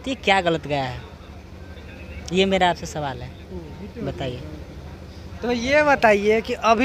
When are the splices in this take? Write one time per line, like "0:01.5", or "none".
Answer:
none